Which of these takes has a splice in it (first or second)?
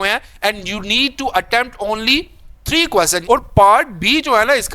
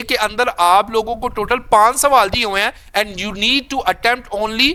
first